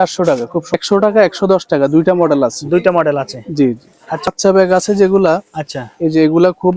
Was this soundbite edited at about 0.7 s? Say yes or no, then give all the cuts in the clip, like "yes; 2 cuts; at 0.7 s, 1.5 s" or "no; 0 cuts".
yes; 2 cuts; at 0.7 s, 4.2 s